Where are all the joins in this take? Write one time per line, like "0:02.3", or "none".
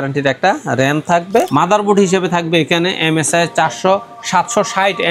0:01.5